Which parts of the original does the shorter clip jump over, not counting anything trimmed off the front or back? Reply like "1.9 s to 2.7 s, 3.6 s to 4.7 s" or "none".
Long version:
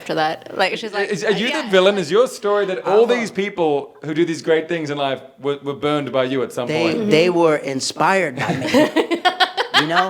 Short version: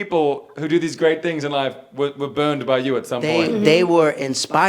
none